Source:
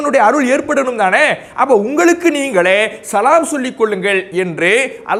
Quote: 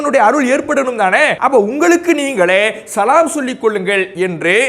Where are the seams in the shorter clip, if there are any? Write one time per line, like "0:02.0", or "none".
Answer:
0:01.4